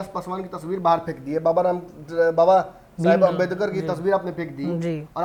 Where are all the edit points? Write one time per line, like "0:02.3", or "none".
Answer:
none